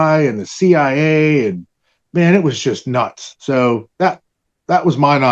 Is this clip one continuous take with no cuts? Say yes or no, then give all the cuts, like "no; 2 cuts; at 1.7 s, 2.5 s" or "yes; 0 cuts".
yes; 0 cuts